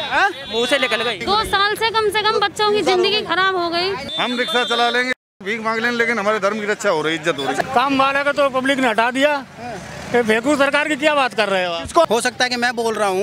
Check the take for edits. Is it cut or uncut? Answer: cut